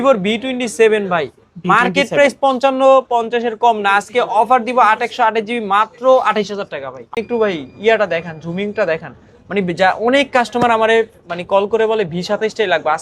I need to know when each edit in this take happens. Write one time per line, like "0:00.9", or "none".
0:07.1